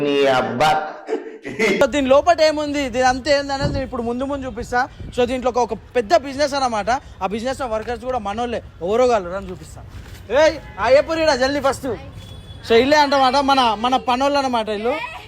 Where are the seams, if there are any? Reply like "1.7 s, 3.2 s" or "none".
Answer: 1.8 s